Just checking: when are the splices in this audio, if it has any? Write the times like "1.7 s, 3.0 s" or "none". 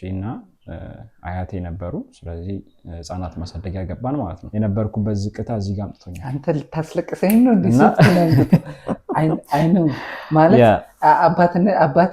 4.4 s

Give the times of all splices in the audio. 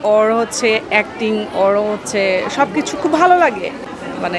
3.4 s

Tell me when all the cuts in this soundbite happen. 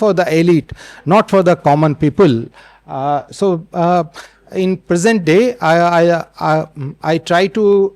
none

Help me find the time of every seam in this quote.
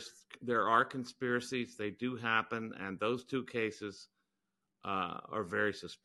none

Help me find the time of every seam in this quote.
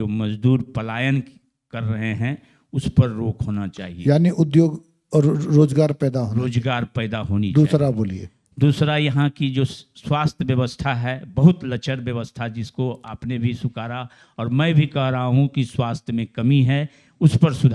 none

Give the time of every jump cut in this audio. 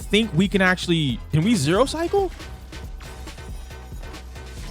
1.2 s

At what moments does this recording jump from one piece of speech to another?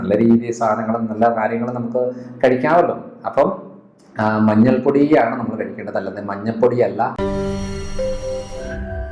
7.2 s

